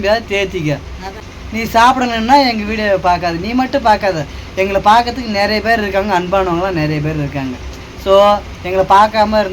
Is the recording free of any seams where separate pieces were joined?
no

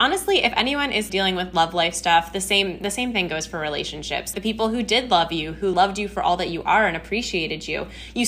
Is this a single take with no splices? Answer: no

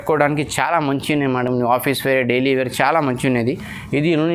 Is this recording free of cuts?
yes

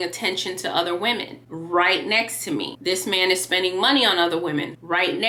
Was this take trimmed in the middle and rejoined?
no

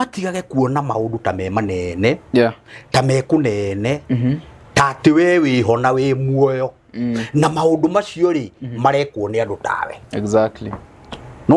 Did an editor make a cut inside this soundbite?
no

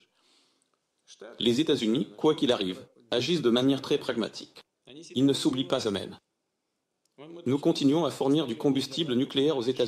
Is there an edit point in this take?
yes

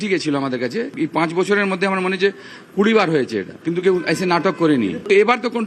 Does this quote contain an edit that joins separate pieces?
yes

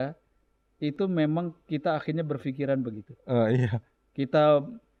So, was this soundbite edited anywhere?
no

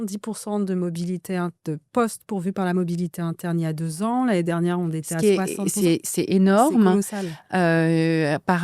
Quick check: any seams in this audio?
no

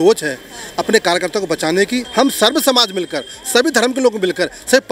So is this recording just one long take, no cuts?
no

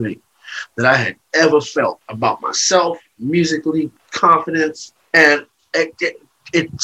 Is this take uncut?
no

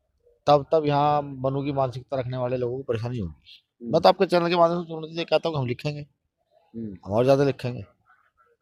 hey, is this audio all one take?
yes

